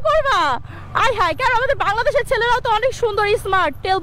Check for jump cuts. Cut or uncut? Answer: uncut